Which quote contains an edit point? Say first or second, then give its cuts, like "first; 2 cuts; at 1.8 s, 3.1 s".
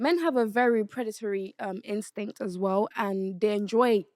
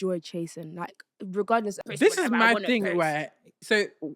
second; 1 cut; at 1.8 s